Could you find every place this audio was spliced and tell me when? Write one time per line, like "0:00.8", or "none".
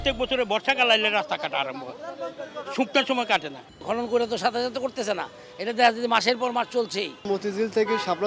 0:03.6
0:07.2